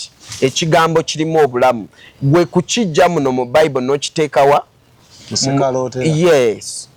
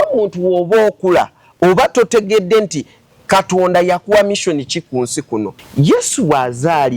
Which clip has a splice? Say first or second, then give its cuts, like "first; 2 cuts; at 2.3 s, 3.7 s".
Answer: second; 1 cut; at 5.6 s